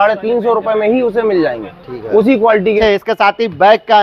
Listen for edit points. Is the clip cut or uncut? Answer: cut